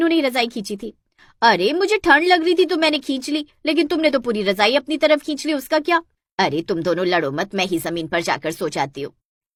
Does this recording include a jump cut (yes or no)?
no